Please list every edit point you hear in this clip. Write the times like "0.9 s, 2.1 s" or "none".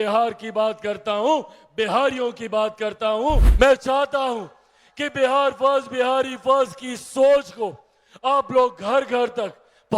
3.5 s